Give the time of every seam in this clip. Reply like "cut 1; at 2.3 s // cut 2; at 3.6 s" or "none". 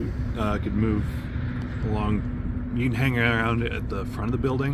none

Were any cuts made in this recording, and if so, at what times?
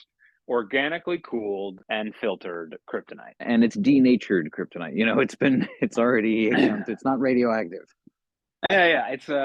cut 1; at 1.8 s // cut 2; at 3.4 s

